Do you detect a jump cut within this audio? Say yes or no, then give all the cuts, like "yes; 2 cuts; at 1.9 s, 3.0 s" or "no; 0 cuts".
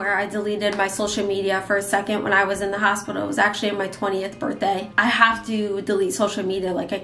no; 0 cuts